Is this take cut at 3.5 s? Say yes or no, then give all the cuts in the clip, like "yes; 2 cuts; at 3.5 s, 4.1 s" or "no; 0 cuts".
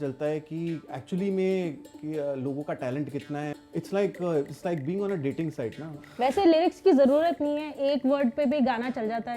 yes; 2 cuts; at 3.5 s, 6.0 s